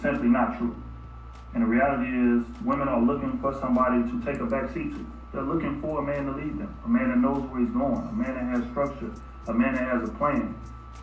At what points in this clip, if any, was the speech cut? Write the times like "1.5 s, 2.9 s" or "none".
none